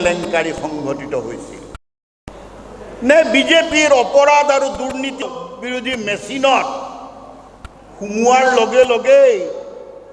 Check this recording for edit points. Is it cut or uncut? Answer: cut